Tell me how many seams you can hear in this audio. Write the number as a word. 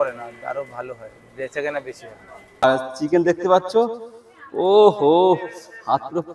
one